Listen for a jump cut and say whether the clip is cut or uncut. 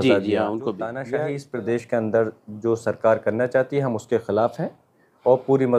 cut